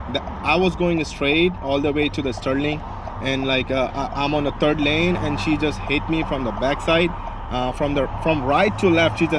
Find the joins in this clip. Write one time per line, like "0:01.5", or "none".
none